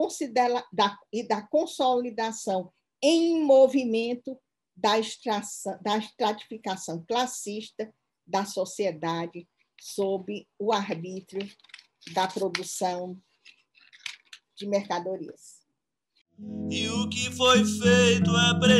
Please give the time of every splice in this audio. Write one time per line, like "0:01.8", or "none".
0:16.6

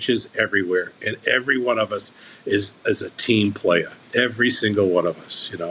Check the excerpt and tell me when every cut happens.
0:04.0

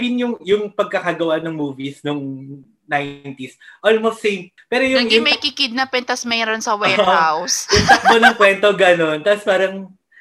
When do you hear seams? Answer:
0:04.5

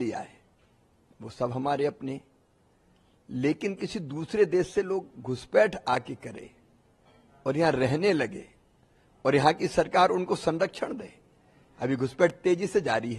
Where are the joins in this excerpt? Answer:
none

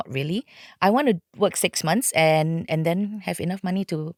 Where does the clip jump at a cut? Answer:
none

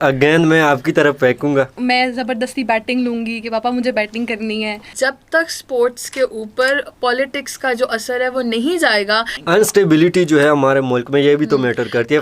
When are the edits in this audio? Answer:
0:01.7
0:04.9
0:09.4

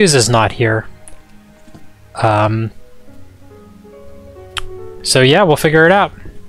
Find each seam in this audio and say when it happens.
none

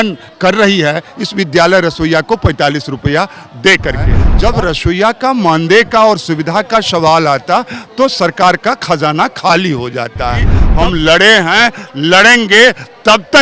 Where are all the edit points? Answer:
0:04.2
0:10.6

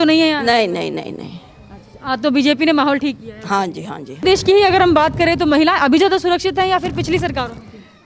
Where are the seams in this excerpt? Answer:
0:04.2

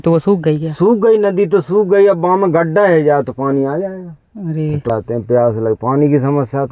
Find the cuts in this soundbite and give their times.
0:04.9

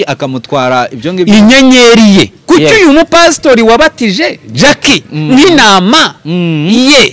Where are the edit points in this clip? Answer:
0:02.4

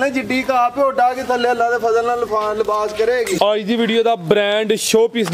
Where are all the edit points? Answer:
0:03.3

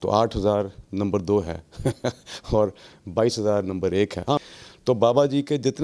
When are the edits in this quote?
0:04.4

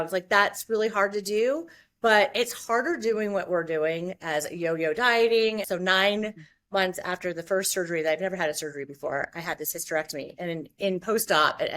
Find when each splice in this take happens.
0:05.6

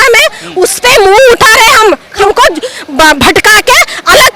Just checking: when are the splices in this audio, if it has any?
0:02.2

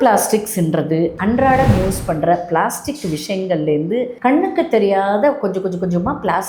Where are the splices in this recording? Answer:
none

